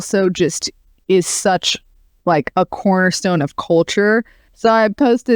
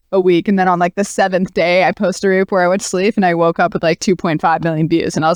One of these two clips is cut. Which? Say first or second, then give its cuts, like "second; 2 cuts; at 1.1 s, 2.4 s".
first; 1 cut; at 4.4 s